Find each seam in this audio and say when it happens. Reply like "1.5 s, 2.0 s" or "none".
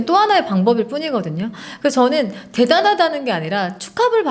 none